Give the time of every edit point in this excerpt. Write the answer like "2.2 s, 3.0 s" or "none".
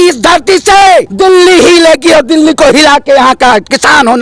1.1 s